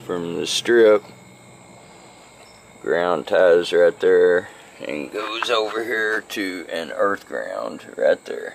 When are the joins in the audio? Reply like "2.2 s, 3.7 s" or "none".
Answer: none